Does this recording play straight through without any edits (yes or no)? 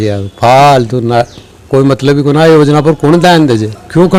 yes